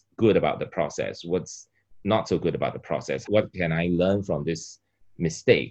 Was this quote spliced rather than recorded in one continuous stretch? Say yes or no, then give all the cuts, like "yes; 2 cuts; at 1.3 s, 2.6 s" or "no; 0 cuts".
no; 0 cuts